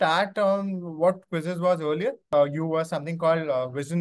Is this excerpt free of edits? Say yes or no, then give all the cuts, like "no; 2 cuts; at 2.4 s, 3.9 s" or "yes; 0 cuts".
no; 1 cut; at 2.2 s